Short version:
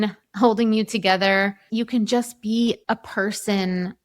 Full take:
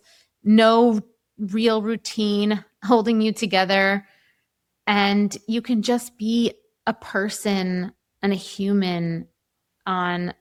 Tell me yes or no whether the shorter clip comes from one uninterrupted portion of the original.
no